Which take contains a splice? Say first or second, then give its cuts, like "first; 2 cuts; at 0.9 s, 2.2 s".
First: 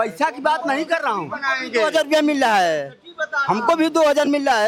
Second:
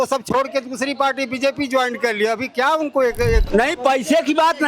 second; 1 cut; at 3.5 s